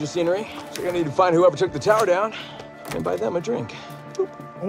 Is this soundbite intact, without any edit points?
yes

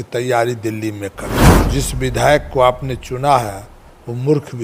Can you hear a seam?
yes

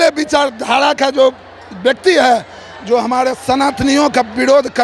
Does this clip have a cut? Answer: no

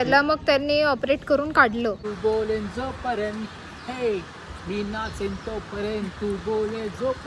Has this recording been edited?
yes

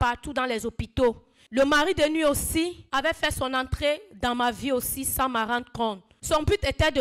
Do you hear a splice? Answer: yes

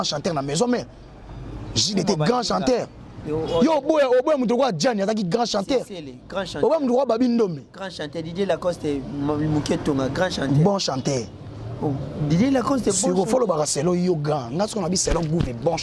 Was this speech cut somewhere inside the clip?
no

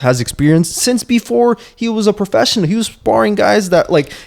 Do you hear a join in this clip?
no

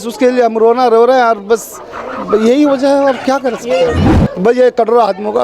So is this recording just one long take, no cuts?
no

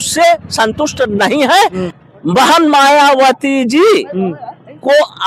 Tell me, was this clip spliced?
yes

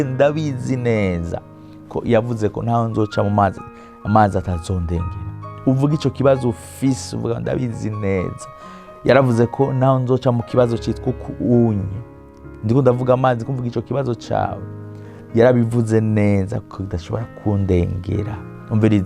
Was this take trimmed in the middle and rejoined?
no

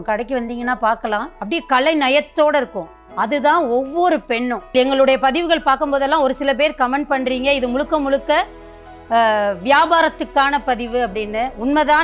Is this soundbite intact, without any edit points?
no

